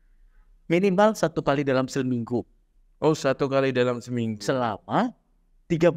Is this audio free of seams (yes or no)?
yes